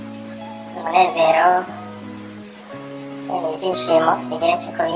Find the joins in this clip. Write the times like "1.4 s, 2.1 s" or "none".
0.8 s, 1.7 s, 3.3 s

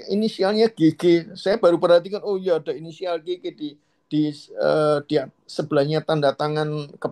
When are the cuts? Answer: none

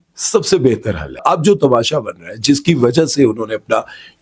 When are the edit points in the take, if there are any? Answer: 1.2 s

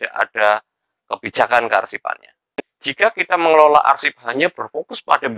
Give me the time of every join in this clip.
2.4 s

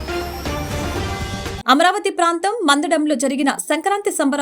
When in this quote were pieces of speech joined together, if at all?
1.6 s

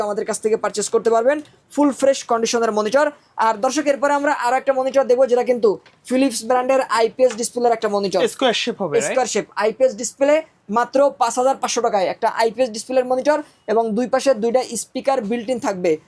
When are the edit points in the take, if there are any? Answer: none

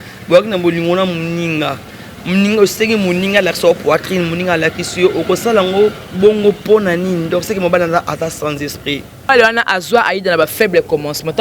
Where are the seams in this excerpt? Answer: 9.3 s

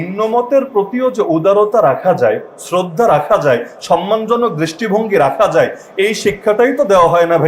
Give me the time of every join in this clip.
none

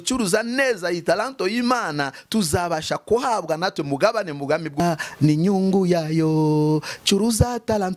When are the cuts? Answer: 4.8 s

